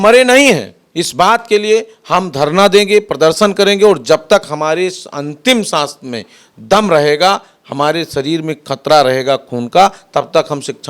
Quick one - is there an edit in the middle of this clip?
no; 0 cuts

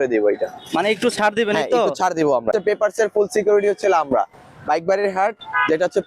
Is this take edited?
yes; 1 cut; at 2.5 s

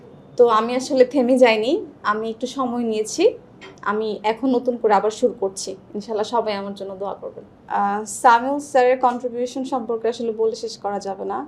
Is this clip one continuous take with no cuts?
no; 1 cut; at 7.5 s

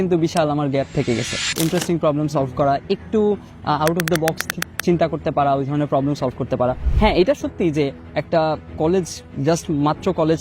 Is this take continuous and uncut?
no; 2 cuts; at 1.6 s, 6.9 s

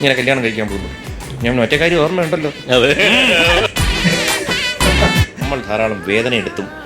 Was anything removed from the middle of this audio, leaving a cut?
yes; 1 cut; at 5.4 s

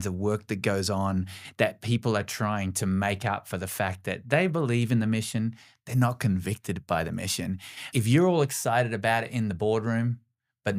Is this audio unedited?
no; 1 cut; at 7.8 s

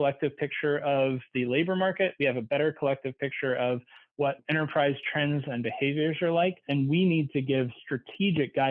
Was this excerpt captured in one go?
yes; 0 cuts

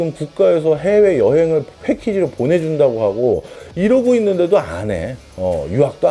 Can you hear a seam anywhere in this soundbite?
yes; 1 cut; at 3.6 s

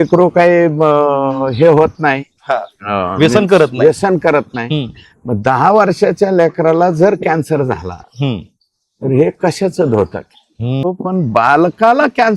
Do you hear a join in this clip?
yes; 1 cut; at 10.8 s

